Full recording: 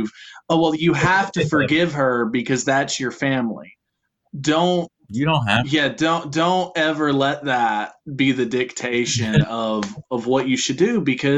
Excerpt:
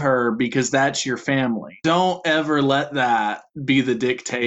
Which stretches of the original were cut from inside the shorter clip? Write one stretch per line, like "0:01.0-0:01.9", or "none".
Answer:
0:03.7-0:06.3